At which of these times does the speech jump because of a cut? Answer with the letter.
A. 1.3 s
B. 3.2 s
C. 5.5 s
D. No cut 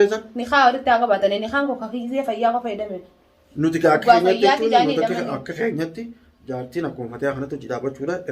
D